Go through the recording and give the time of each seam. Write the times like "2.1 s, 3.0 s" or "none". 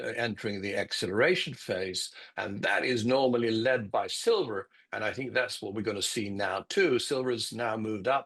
none

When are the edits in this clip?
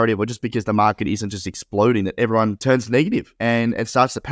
2.6 s, 3.3 s

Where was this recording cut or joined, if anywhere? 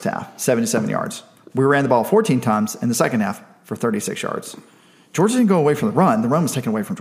none

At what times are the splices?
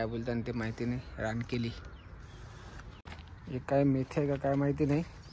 3.1 s

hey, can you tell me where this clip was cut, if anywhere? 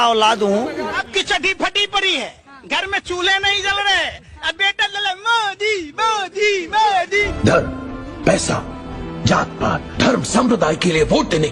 1.0 s, 7.3 s

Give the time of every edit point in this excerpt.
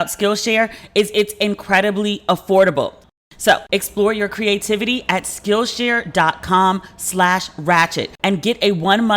3.1 s

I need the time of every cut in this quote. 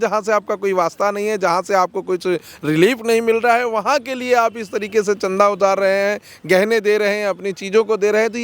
none

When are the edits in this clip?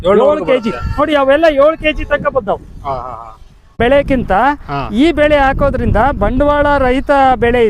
3.7 s

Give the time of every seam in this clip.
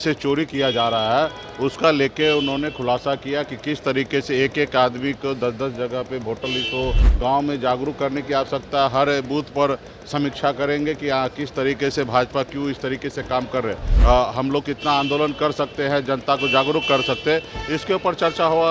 7.0 s, 13.9 s

